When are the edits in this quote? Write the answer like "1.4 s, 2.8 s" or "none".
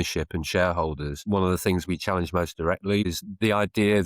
1.1 s, 3.1 s

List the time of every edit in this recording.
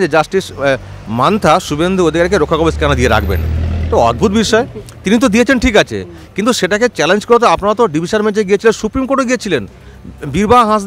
none

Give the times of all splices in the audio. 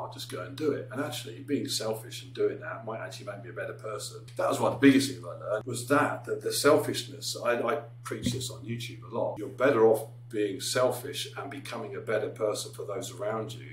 4.2 s, 5.7 s, 9.4 s

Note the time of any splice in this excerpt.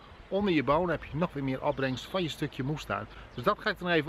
none

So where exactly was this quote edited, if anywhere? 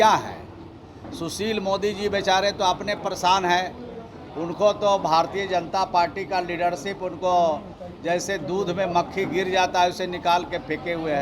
none

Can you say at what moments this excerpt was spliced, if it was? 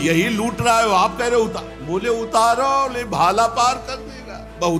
none

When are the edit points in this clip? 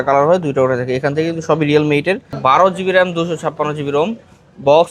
2.4 s

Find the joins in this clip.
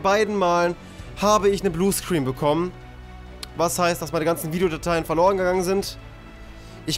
none

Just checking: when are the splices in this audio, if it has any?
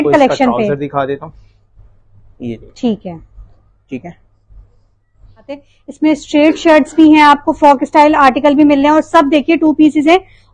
5.6 s

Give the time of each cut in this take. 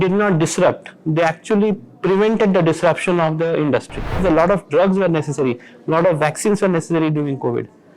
4.2 s

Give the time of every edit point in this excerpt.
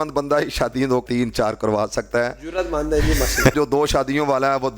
1.0 s, 3.5 s

